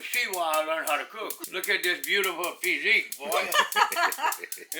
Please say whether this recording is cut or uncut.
cut